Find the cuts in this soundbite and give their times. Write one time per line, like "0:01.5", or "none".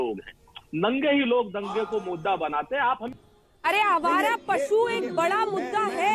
0:03.1